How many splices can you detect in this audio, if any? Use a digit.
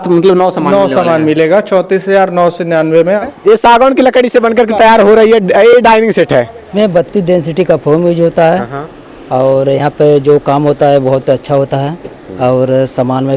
2